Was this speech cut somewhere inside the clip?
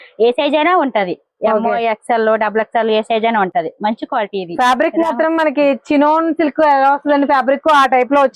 no; 0 cuts

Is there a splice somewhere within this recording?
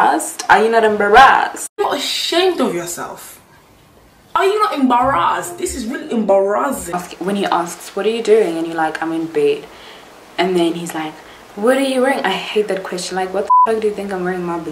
yes; 2 cuts; at 1.8 s, 7.0 s

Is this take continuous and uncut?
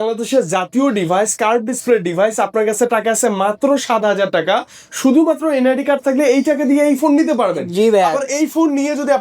yes; 0 cuts

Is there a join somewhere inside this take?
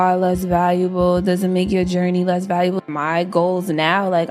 yes; 1 cut; at 2.8 s

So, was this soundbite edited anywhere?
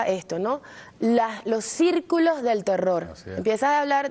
yes; 1 cut; at 1.7 s

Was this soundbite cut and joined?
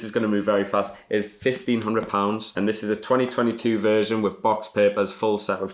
no; 0 cuts

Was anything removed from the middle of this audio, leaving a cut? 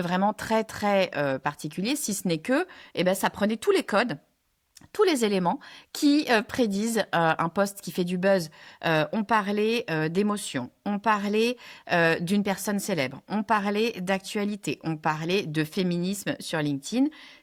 no; 0 cuts

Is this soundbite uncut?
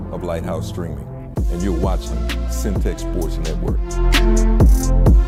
yes; 0 cuts

